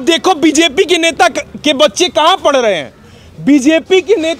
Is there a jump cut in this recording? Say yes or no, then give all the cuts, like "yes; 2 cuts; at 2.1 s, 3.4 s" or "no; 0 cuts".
no; 0 cuts